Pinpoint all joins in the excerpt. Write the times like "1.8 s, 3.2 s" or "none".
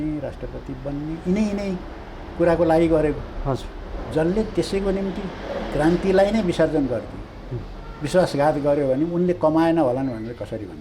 none